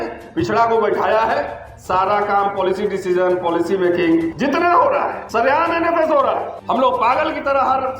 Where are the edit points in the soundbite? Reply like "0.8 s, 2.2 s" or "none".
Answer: 4.3 s, 5.2 s, 6.5 s